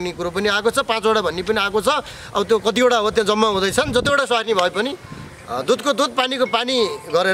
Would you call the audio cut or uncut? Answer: uncut